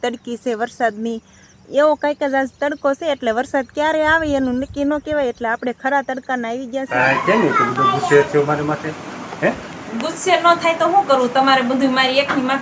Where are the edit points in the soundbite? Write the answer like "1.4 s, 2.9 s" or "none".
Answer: 6.9 s